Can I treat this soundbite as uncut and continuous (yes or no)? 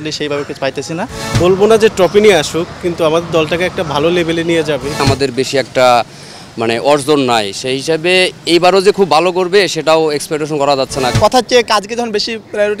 no